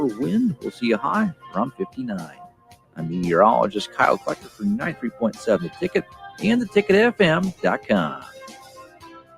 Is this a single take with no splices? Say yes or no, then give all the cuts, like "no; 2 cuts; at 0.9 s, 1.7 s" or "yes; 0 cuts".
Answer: no; 1 cut; at 8.2 s